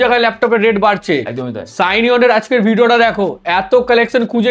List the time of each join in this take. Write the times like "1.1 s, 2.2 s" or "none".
none

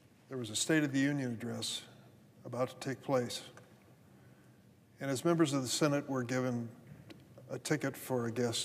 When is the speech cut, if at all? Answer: 0.9 s, 6.0 s

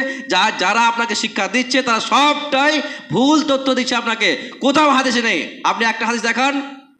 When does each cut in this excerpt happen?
none

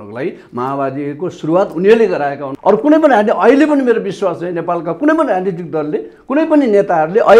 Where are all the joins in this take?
2.5 s

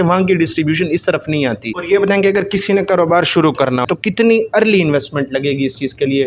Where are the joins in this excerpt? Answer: 1.7 s, 3.9 s

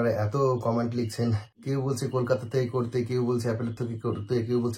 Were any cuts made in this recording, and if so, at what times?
1.5 s

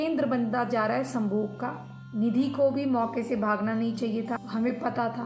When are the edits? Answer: 2.0 s, 4.4 s

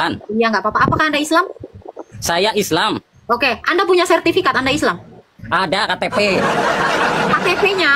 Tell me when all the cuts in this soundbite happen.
none

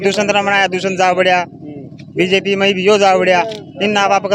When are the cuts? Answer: none

